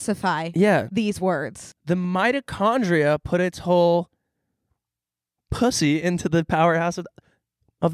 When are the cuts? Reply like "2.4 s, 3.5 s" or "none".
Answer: 1.6 s